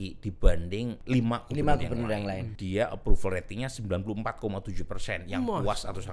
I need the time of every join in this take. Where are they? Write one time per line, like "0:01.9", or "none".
0:01.0
0:02.5